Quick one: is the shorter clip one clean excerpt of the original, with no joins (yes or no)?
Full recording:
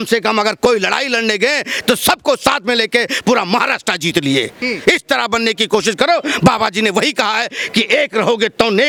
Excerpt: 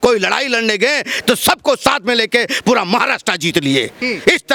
yes